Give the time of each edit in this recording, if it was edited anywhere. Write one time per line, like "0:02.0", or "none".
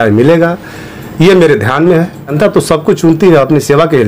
0:02.3